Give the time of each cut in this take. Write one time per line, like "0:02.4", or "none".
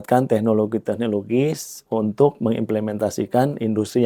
none